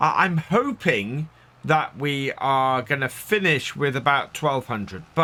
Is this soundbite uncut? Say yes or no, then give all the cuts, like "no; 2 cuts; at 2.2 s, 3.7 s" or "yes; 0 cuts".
yes; 0 cuts